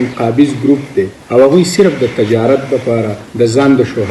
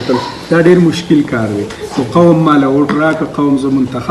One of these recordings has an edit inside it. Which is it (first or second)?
first